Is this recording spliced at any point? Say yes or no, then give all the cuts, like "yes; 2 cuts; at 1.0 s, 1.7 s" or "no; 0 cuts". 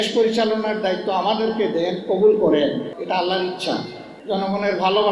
yes; 2 cuts; at 2.9 s, 4.1 s